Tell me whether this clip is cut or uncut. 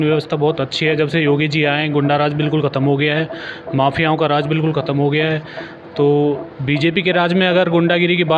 uncut